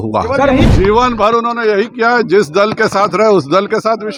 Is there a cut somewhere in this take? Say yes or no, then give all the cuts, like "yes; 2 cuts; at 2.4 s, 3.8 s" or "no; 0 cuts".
no; 0 cuts